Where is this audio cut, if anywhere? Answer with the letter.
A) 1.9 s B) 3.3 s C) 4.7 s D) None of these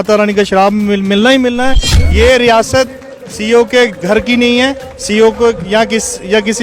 A